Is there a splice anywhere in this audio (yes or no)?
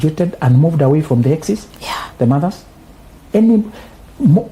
no